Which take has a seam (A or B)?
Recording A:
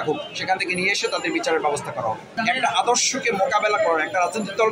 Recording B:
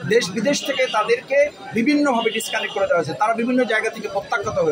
A